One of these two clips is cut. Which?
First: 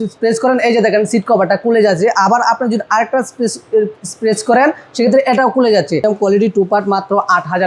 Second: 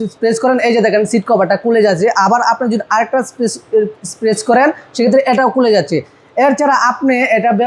first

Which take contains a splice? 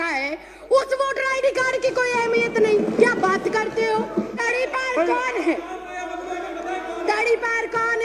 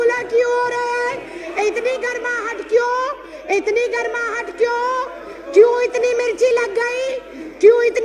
first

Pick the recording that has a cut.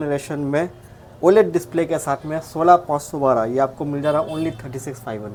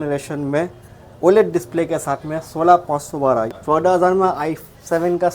second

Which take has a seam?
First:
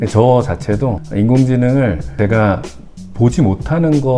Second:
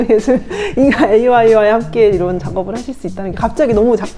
first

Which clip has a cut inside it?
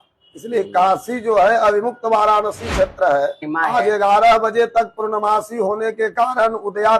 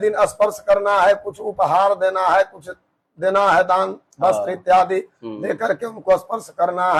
first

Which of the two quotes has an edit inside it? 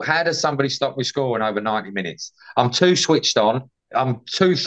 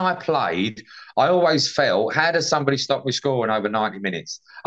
first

